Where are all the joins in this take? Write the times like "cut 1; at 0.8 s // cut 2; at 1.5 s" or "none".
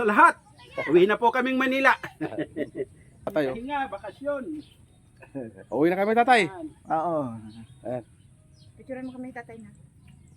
cut 1; at 3.3 s